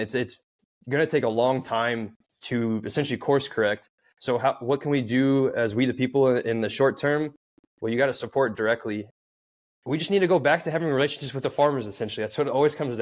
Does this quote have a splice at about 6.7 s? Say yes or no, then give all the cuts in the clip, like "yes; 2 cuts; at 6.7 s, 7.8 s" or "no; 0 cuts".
no; 1 cut; at 9.1 s